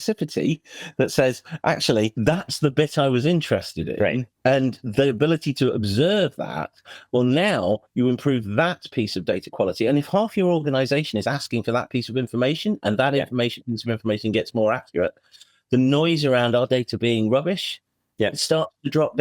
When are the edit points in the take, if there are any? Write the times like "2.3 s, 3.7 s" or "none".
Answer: 2.2 s, 4.3 s